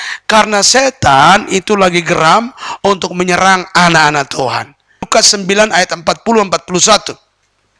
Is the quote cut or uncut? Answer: cut